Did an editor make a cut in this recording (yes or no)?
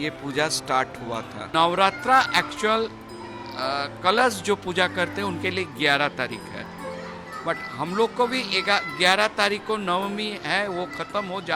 yes